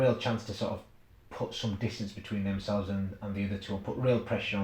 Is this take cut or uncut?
uncut